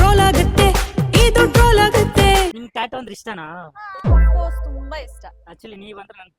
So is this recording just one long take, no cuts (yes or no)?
no